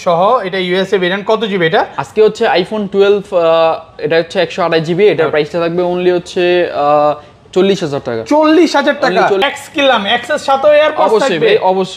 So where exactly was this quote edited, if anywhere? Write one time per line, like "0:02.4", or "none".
0:09.4